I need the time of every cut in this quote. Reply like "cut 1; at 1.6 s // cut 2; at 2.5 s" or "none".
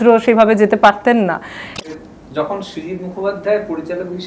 cut 1; at 1.7 s

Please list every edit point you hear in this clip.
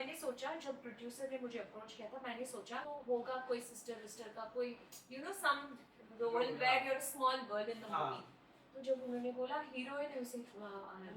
cut 1; at 2.8 s

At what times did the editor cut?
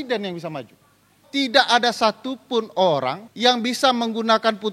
cut 1; at 1.2 s // cut 2; at 3.2 s

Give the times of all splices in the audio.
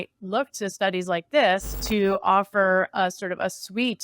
cut 1; at 1.7 s

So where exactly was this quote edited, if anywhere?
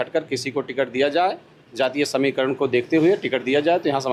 none

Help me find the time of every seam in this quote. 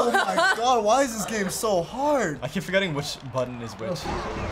cut 1; at 2.4 s

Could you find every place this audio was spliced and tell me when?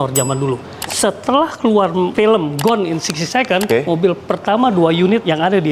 cut 1; at 0.8 s // cut 2; at 3.7 s

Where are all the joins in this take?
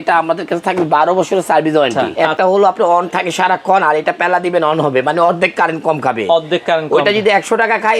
cut 1; at 2.1 s

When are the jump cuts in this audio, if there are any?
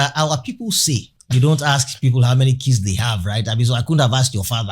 cut 1; at 1.1 s

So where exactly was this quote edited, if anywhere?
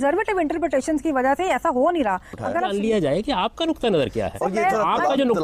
cut 1; at 2.6 s

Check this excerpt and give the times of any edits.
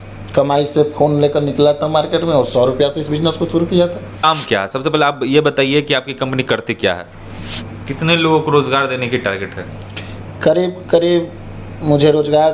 cut 1; at 4.2 s // cut 2; at 7.5 s

